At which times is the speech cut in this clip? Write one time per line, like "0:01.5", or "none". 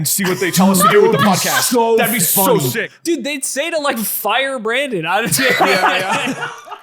0:02.6